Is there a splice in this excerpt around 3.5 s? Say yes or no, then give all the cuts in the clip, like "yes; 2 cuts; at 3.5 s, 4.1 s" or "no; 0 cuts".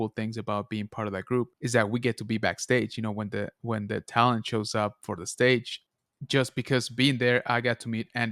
no; 2 cuts; at 1.6 s, 5.8 s